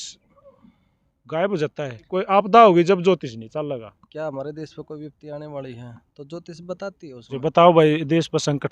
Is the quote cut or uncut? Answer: cut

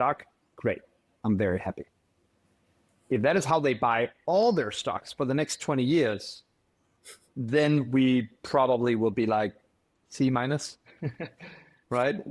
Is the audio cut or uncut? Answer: uncut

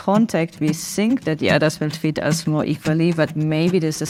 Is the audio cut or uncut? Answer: uncut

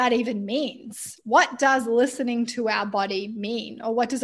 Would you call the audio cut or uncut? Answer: uncut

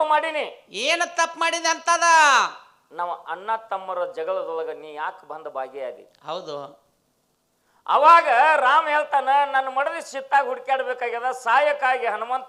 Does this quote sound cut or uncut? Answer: uncut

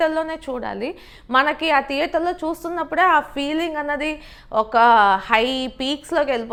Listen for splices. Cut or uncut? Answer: uncut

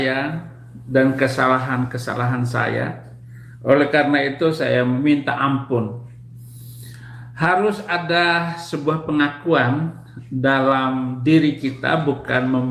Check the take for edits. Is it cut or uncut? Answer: uncut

